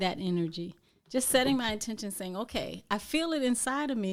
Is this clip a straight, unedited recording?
yes; 0 cuts

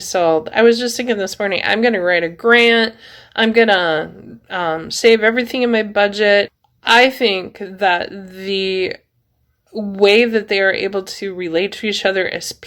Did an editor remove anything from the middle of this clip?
yes; 1 cut; at 6.5 s

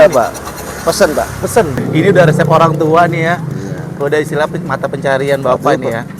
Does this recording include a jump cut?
yes; 1 cut; at 1.8 s

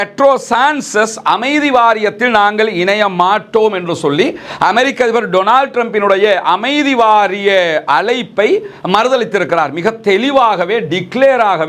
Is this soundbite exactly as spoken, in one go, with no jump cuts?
yes; 0 cuts

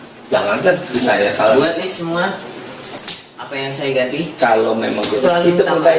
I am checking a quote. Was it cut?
yes; 2 cuts; at 1.0 s, 5.2 s

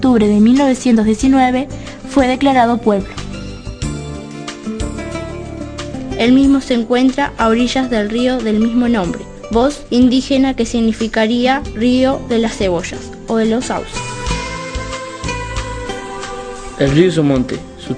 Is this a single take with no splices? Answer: no; 1 cut; at 12.8 s

